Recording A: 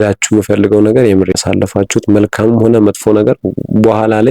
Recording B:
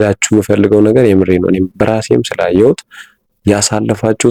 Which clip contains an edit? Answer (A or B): A